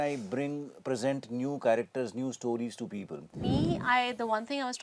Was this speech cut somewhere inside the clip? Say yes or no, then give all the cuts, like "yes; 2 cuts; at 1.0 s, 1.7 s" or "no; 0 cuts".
yes; 1 cut; at 3.5 s